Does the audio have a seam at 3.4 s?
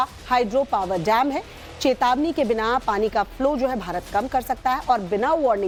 no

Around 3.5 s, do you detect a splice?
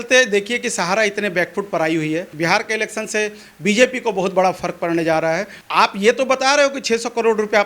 no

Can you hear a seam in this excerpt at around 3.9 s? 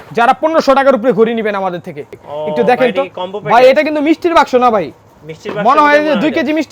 no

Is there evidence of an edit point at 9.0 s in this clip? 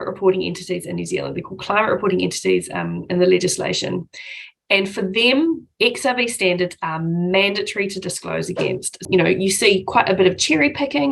yes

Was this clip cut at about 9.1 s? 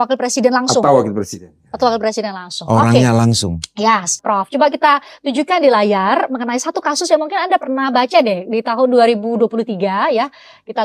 no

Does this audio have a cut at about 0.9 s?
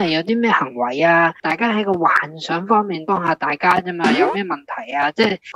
no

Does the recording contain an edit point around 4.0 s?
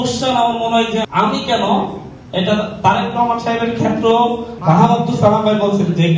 no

